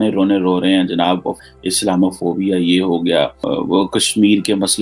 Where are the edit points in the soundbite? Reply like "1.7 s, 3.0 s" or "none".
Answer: 1.4 s, 3.4 s